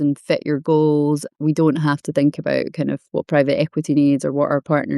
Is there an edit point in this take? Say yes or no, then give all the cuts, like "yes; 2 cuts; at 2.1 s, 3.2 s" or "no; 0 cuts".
yes; 1 cut; at 1.3 s